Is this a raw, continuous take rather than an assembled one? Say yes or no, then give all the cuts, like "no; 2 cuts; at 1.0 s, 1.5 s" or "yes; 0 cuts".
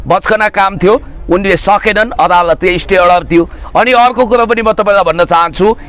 yes; 0 cuts